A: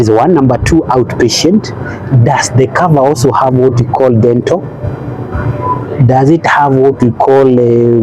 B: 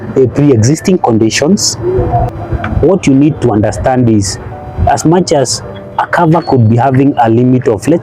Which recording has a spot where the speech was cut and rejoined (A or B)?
B